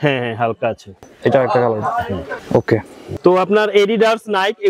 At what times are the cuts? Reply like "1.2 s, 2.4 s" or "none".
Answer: 1.1 s, 2.4 s, 3.0 s